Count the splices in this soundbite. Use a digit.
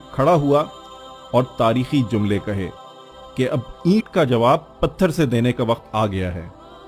1